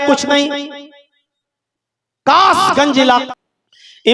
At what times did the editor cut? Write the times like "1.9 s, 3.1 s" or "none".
3.2 s